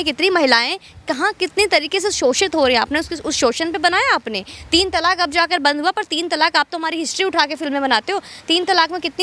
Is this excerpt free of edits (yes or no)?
yes